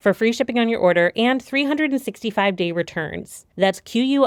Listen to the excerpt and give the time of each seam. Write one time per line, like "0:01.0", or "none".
none